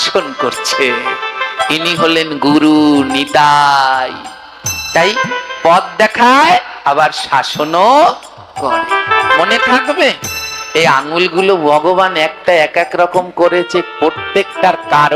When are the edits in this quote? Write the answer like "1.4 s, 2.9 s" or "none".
none